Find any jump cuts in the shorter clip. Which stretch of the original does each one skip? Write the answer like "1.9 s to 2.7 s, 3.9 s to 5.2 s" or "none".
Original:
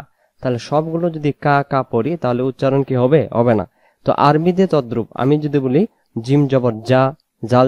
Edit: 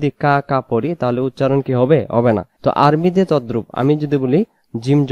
3.7 s to 3.9 s